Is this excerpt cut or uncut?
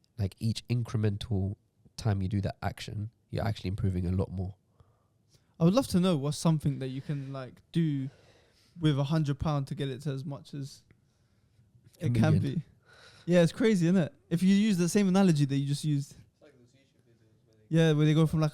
uncut